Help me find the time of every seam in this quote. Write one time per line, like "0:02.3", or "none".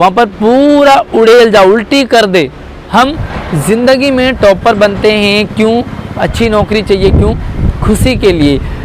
0:02.9